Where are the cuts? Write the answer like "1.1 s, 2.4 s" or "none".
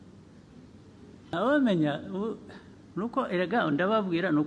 1.3 s